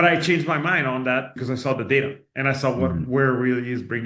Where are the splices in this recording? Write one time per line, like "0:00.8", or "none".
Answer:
0:01.3